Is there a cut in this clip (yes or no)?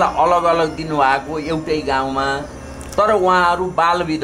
no